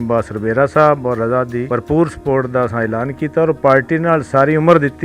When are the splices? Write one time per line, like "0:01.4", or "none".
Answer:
0:01.6